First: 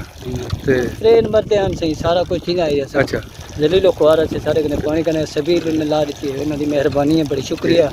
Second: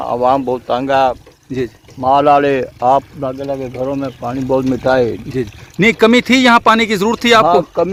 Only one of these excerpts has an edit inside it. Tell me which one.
first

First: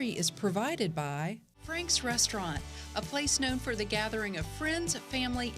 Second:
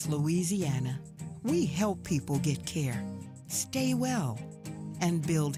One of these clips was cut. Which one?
first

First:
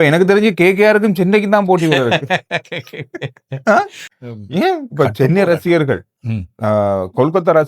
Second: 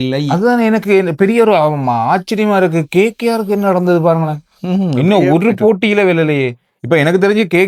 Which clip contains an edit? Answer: first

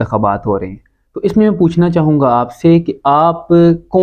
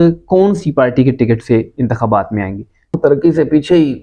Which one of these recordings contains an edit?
second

